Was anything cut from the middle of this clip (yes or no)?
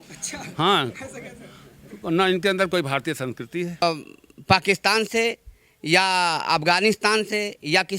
yes